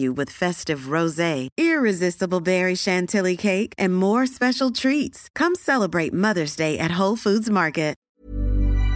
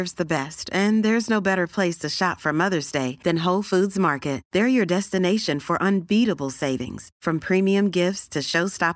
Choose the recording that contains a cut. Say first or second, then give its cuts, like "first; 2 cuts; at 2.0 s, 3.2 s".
first; 1 cut; at 8.0 s